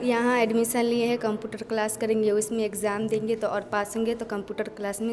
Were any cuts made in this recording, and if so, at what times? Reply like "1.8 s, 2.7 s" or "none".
none